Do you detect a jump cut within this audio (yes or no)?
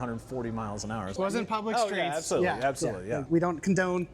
yes